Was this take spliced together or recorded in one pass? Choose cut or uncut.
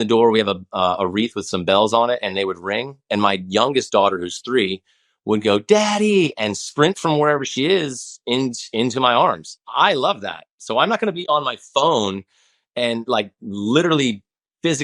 uncut